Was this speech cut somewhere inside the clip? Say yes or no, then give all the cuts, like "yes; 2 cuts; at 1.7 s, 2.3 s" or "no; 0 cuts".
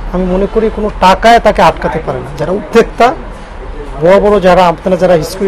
no; 0 cuts